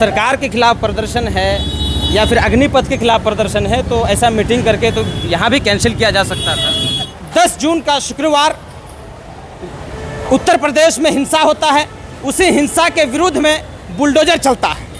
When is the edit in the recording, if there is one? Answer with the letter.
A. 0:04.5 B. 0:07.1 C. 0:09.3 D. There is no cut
B